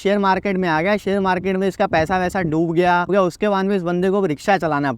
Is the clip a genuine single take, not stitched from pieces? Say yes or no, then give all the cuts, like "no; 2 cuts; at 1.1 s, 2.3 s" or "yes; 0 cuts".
no; 1 cut; at 3.1 s